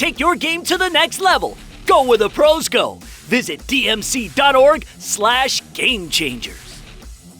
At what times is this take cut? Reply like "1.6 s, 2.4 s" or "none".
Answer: 6.5 s